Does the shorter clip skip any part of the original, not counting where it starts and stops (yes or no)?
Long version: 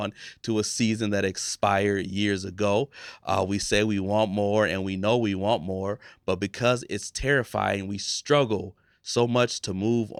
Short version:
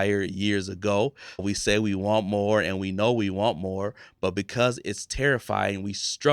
yes